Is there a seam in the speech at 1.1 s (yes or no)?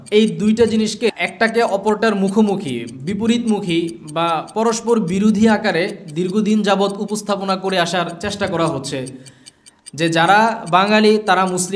yes